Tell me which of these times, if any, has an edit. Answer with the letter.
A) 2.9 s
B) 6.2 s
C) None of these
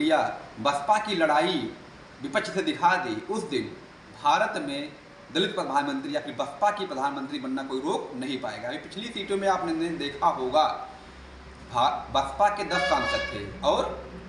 C